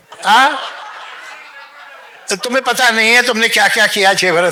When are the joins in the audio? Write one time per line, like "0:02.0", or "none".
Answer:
none